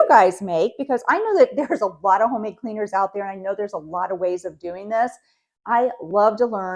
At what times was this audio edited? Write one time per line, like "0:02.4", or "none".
none